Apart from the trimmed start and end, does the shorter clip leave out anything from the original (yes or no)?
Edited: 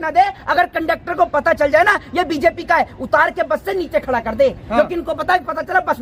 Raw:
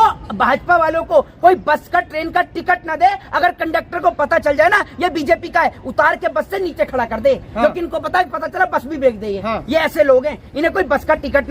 no